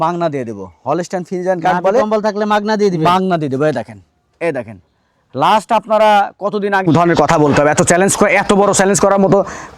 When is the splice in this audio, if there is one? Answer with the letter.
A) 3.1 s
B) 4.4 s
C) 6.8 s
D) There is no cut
C